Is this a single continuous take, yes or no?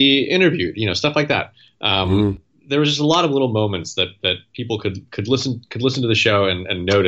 yes